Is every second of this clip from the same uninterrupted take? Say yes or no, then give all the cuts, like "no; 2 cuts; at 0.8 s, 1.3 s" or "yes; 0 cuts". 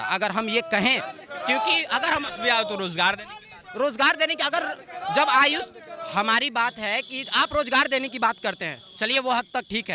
yes; 0 cuts